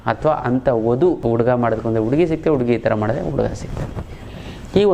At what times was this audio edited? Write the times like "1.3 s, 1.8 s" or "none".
1.2 s